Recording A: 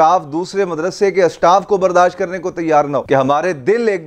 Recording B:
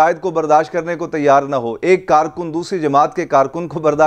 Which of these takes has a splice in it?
A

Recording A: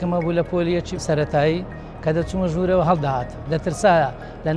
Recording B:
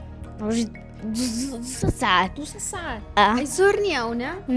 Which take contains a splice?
A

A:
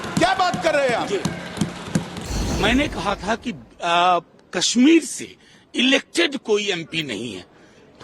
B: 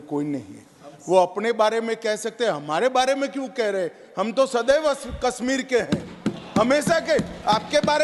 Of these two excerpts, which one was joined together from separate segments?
A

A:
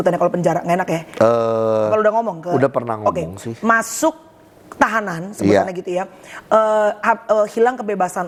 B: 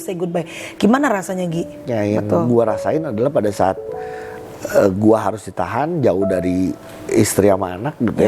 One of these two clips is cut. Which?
B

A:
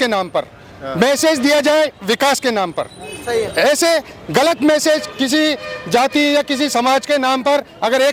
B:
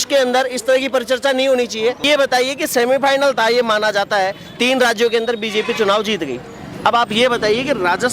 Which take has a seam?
B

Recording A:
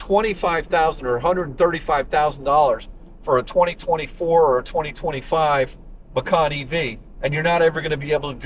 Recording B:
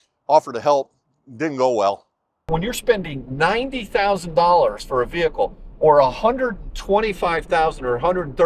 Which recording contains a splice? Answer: B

